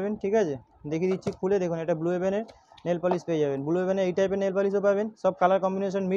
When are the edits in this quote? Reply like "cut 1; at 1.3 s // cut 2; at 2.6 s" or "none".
none